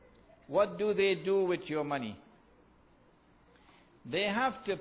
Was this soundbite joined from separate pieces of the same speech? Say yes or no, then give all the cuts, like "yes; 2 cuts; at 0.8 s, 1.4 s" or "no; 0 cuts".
yes; 1 cut; at 1.8 s